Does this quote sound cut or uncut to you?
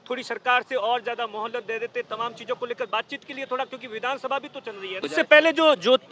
cut